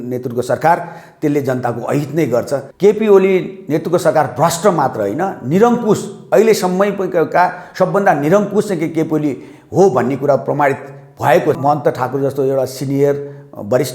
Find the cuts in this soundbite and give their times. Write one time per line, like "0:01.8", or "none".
0:02.6
0:11.6